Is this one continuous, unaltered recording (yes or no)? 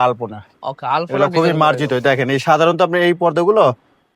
yes